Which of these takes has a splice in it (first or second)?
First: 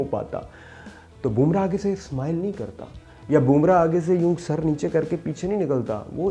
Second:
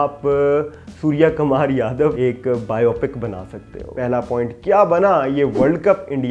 second